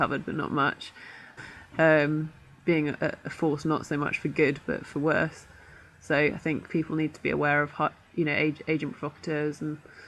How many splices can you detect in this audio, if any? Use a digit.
0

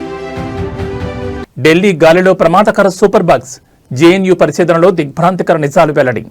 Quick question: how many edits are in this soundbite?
1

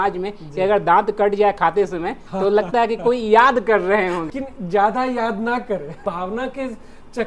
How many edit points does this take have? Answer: 2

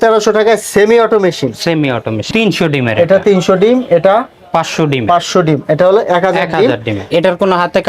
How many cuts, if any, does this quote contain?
2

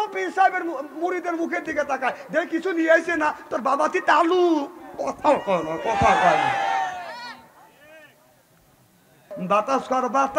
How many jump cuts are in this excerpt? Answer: 1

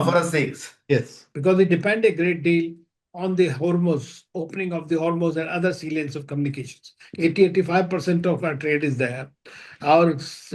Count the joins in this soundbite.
1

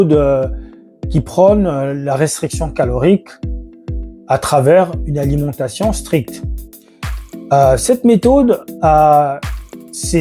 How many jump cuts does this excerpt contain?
0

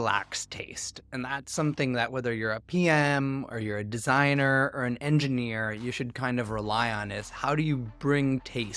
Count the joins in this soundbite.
0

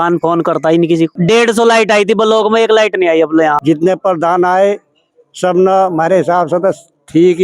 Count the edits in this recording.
2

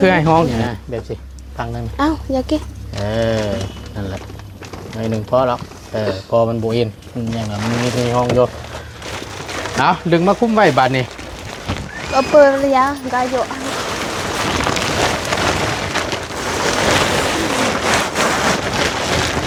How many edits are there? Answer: 0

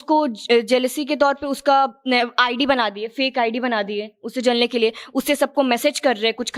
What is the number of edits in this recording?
0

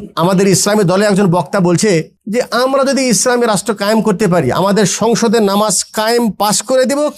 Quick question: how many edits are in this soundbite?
1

